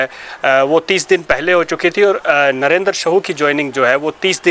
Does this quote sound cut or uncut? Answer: uncut